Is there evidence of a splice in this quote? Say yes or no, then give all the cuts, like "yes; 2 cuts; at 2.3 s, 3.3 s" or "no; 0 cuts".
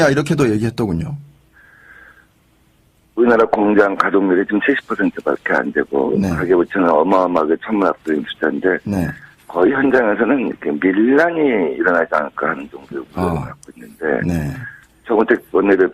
yes; 1 cut; at 9.2 s